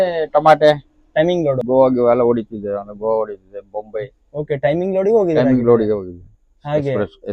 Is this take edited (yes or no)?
yes